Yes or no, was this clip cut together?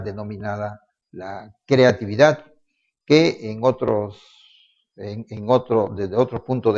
no